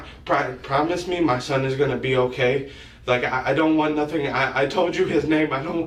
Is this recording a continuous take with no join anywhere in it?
yes; 0 cuts

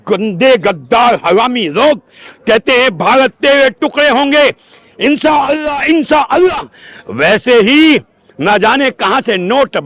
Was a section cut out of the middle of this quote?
no; 0 cuts

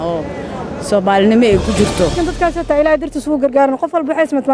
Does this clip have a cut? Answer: yes; 1 cut; at 2.1 s

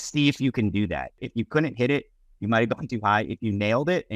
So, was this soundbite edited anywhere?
yes; 1 cut; at 1.2 s

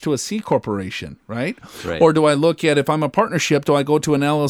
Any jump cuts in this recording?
no; 0 cuts

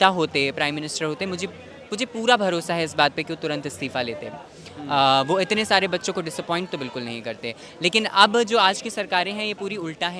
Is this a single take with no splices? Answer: yes; 0 cuts

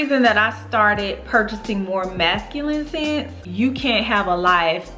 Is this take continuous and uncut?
no; 1 cut; at 3.4 s

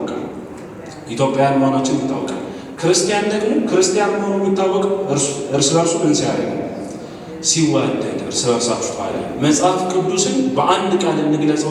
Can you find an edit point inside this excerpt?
yes; 1 cut; at 9.2 s

